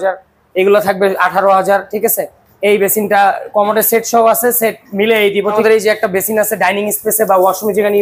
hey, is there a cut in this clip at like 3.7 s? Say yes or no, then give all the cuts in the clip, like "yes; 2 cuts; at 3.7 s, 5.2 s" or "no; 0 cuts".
no; 1 cut; at 5.6 s